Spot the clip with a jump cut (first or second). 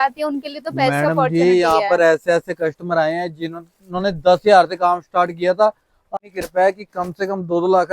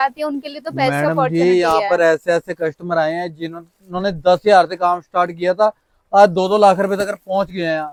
first